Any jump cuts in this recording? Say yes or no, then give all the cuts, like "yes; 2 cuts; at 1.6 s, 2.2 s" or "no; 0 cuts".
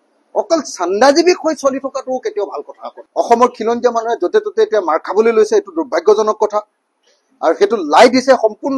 yes; 1 cut; at 2.9 s